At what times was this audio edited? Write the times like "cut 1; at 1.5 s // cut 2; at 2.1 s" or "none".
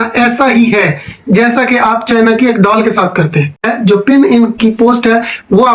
cut 1; at 3.7 s